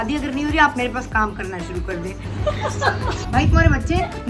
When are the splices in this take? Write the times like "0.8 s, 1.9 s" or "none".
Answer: 2.2 s, 3.2 s

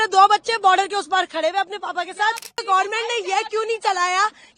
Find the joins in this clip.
2.6 s

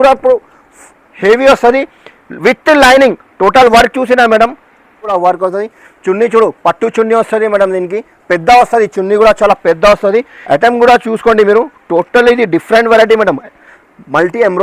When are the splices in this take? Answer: 5.0 s, 10.3 s

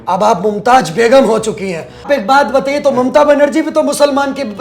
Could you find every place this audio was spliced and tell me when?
2.0 s

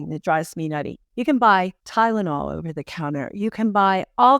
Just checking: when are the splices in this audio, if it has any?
1.0 s, 1.8 s

